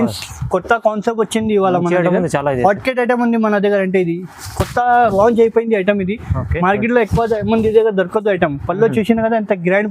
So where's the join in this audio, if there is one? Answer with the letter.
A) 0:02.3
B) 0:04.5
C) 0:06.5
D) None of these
D